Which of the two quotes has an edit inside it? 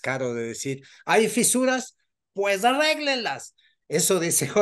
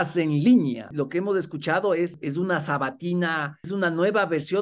second; 3 cuts; at 0.9 s, 2.2 s, 3.7 s

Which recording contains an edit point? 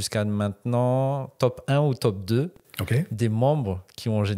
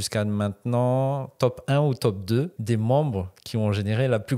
second; 1 cut; at 2.6 s

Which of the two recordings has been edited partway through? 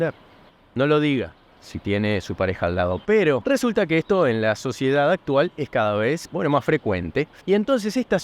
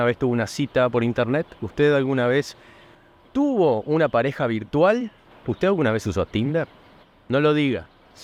first; 3 cuts; at 3.4 s, 6.3 s, 7.3 s

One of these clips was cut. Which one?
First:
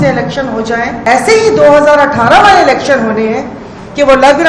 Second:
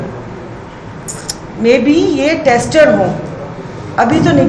first; 1 cut; at 1.0 s

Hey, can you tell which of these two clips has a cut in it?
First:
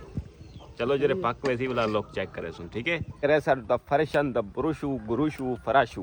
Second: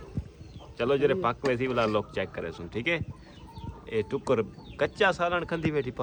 first; 1 cut; at 3.2 s

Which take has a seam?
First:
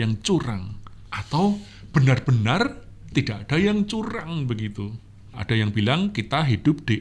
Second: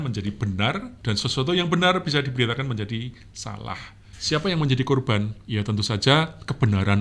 second; 1 cut; at 0.9 s

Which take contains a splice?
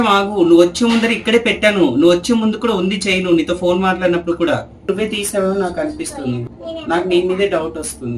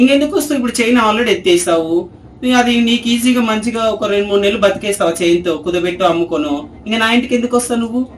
first; 2 cuts; at 4.9 s, 6.5 s

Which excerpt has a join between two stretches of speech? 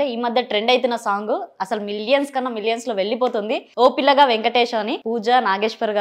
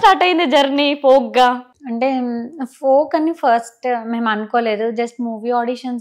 first; 1 cut; at 5.0 s

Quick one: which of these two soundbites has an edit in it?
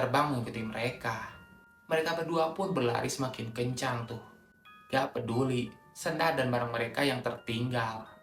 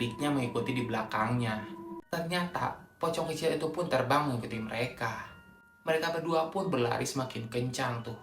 second; 1 cut; at 1.9 s

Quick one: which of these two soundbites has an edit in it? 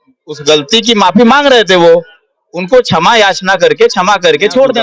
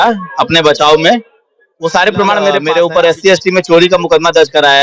second; 1 cut; at 2.6 s

